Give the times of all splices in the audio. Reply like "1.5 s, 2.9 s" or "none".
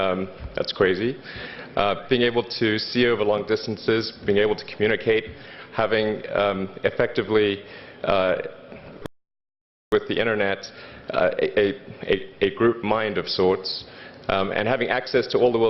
none